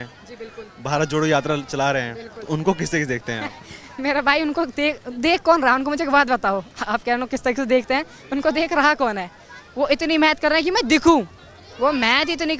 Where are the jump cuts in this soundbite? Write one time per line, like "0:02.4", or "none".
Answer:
none